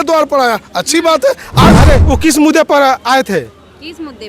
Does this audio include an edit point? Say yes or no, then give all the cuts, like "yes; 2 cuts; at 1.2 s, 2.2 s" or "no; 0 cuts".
yes; 1 cut; at 1.7 s